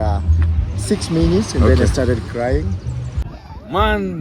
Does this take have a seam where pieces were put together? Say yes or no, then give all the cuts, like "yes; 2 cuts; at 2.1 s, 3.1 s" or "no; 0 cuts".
yes; 1 cut; at 3.1 s